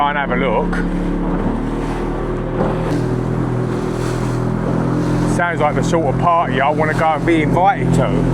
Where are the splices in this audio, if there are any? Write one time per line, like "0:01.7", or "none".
none

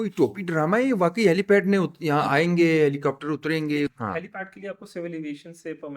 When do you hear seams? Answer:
0:04.0

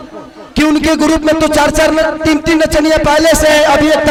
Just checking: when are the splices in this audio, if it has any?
none

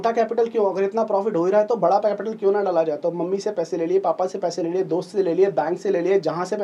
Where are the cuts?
none

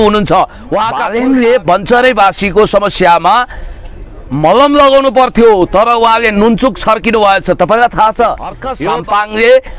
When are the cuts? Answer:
0:01.0
0:08.7

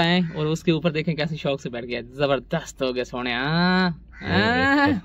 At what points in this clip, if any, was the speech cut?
none

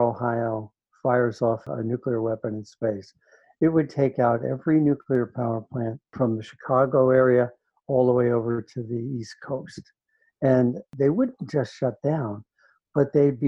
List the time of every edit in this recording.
0:01.6
0:06.0
0:10.9

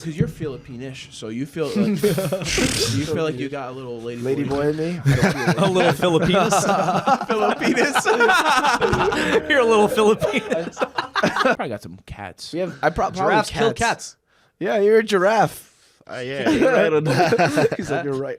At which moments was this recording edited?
0:11.6

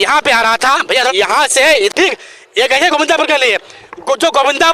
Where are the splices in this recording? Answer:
0:01.9

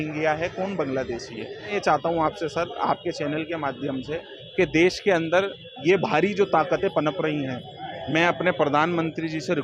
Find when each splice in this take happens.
0:01.7

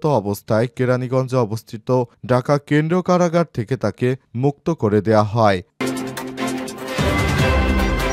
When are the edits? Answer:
0:05.8

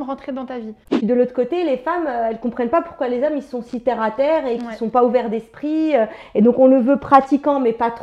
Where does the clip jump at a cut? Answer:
0:00.9

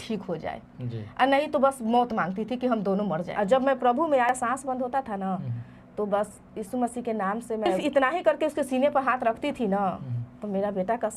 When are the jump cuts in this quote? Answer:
0:03.3
0:04.3
0:07.8

